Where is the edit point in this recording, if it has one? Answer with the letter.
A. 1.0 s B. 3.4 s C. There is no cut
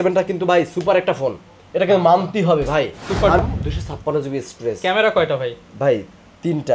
B